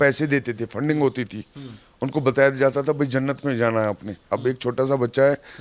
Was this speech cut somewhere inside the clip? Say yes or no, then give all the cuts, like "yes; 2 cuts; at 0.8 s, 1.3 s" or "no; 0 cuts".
no; 0 cuts